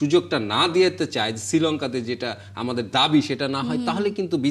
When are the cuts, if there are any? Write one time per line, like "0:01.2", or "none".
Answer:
none